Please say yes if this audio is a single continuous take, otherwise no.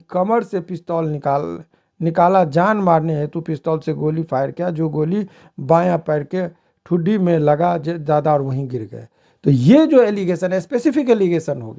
yes